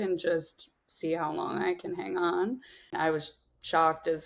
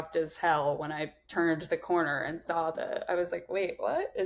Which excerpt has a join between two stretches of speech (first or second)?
first